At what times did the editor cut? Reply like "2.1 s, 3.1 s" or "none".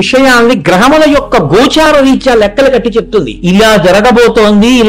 3.3 s